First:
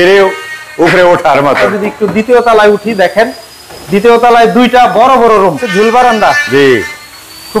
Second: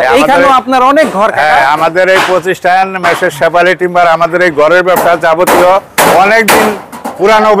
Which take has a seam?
first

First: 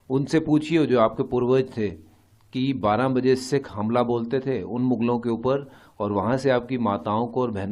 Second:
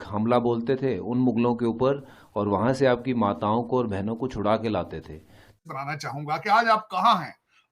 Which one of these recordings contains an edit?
second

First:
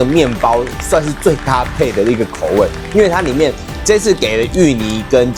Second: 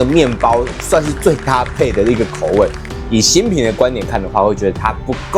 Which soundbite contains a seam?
second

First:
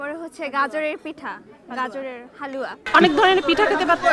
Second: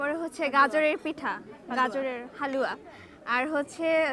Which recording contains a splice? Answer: first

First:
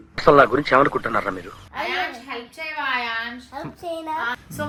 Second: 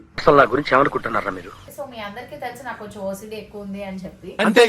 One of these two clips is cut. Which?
second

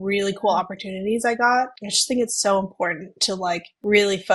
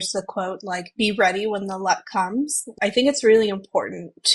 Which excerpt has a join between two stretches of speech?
second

